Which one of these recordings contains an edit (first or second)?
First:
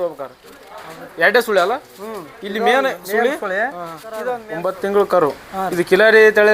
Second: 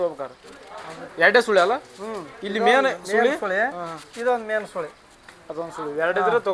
first